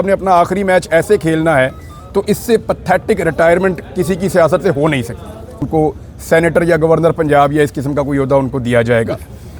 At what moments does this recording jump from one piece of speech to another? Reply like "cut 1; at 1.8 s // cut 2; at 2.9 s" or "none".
cut 1; at 5.7 s

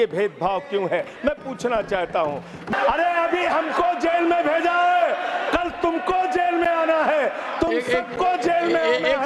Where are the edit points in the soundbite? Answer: cut 1; at 2.7 s

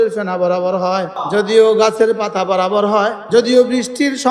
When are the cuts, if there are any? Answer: cut 1; at 1.2 s // cut 2; at 3.2 s

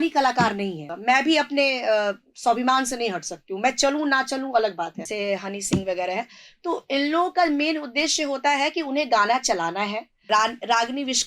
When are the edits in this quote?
cut 1; at 0.9 s // cut 2; at 5.0 s // cut 3; at 10.3 s

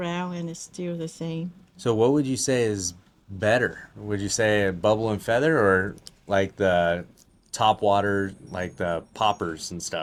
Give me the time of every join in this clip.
none

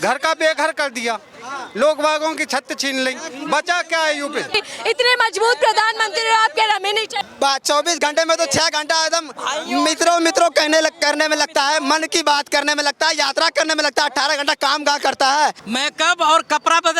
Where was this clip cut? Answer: cut 1; at 4.6 s // cut 2; at 15.6 s

